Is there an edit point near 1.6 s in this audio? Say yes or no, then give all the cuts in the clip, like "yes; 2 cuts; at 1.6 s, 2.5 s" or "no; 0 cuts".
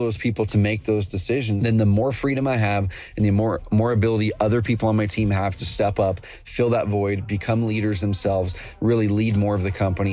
yes; 1 cut; at 1.6 s